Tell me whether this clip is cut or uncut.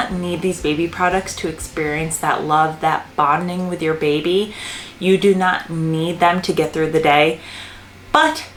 uncut